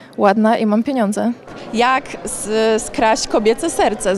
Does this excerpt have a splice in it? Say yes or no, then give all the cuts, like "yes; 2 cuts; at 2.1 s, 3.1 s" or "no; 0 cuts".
yes; 1 cut; at 1.5 s